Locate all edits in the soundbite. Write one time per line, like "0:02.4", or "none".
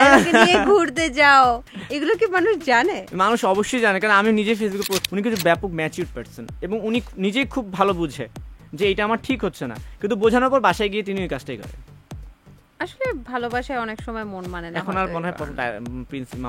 0:05.0